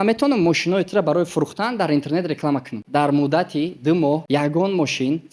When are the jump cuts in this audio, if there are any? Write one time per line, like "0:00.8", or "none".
0:02.8
0:04.2